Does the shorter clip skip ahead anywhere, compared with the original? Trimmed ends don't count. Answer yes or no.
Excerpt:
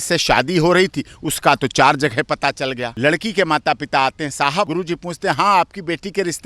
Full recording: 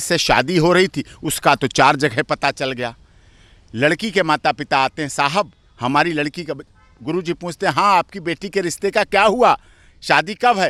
yes